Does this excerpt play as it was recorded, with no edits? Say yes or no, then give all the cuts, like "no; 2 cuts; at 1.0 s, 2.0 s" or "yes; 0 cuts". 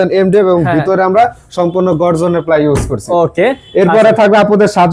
yes; 0 cuts